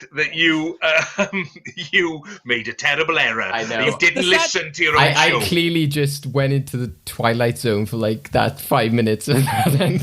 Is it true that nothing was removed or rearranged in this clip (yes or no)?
yes